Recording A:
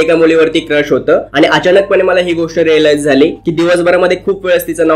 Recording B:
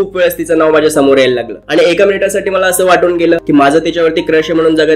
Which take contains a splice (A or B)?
B